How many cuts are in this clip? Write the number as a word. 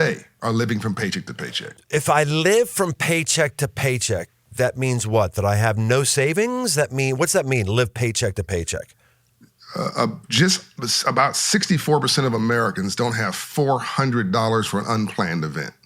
one